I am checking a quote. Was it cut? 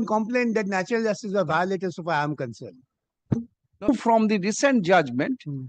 yes; 1 cut; at 3.9 s

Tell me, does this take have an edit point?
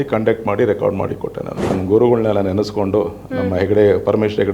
yes; 1 cut; at 1.7 s

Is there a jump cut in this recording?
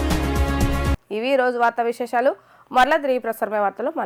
no; 0 cuts

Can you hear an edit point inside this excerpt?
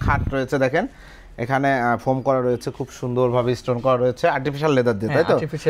no; 0 cuts

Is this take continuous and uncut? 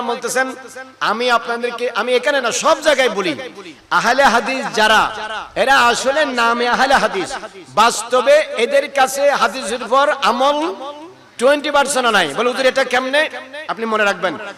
yes; 0 cuts

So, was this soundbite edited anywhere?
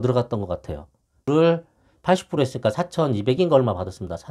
yes; 1 cut; at 1.3 s

